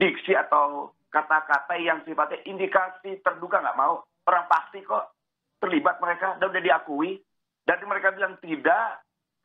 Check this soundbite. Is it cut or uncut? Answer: uncut